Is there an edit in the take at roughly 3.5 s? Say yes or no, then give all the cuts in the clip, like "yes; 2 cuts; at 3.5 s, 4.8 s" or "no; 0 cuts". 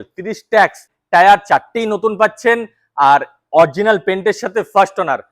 no; 1 cut; at 0.9 s